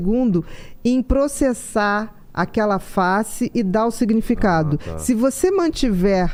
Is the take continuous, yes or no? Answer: yes